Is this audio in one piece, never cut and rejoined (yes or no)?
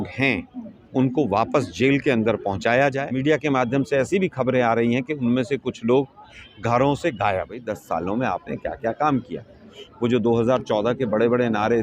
no